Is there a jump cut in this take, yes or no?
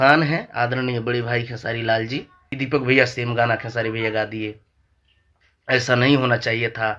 yes